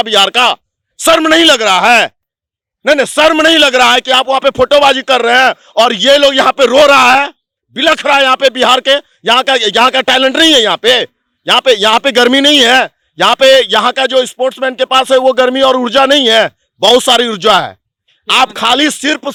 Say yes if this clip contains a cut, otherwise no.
no